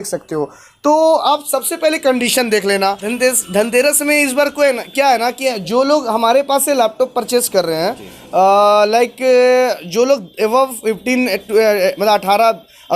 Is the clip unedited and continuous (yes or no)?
no